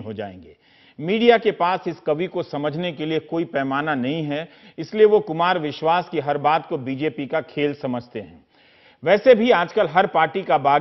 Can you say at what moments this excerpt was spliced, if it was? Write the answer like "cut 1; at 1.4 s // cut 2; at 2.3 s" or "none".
cut 1; at 1.2 s